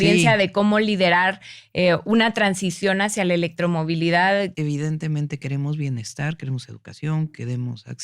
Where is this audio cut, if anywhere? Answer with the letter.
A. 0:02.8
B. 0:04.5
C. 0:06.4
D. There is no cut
B